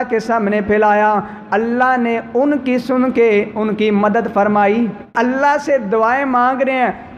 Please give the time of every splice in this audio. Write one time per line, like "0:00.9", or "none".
0:05.1